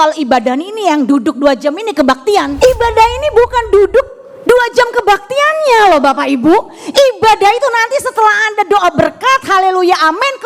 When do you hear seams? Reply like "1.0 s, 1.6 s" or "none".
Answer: 2.5 s